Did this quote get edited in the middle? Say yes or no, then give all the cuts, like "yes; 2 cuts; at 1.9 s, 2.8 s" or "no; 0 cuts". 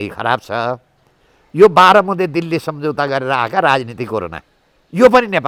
no; 0 cuts